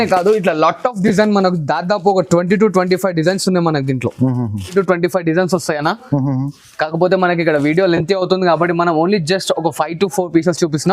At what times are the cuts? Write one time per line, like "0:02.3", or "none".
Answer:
0:04.7